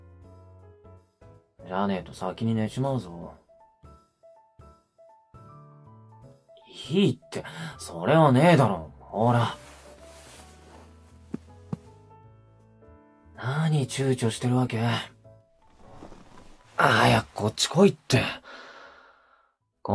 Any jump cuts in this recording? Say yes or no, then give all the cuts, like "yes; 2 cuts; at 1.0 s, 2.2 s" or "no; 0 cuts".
yes; 1 cut; at 13.8 s